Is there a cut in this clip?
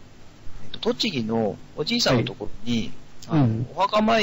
no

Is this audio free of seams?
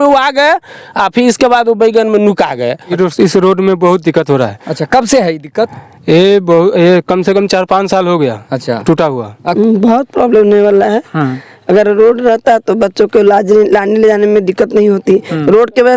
no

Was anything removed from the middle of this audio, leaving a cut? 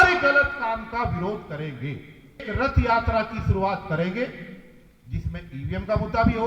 yes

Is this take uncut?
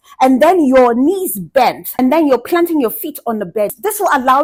yes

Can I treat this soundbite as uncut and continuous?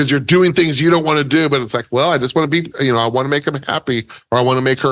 yes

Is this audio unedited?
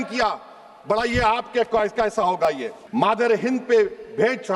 no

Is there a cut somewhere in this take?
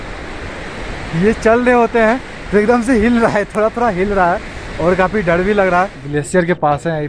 yes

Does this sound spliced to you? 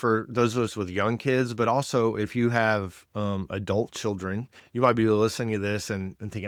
no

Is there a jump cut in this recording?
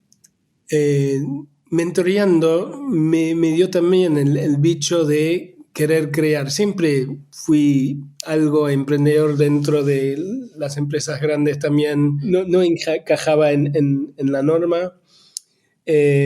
yes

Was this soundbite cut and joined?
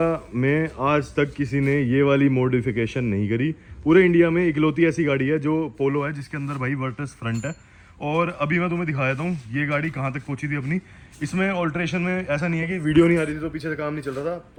no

